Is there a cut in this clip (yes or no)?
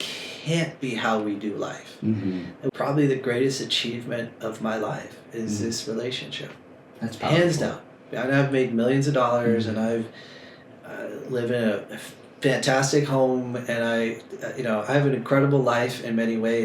yes